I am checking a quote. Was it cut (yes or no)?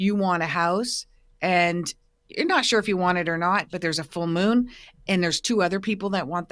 no